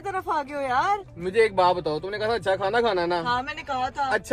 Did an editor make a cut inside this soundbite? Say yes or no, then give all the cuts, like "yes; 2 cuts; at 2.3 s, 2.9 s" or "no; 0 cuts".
no; 0 cuts